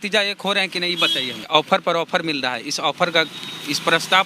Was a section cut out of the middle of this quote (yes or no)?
yes